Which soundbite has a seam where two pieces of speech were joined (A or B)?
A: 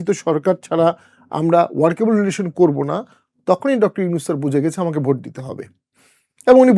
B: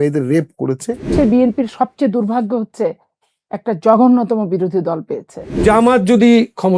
B